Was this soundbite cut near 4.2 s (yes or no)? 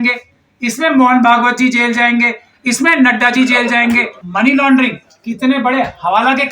yes